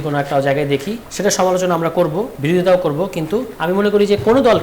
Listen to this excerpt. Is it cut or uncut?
cut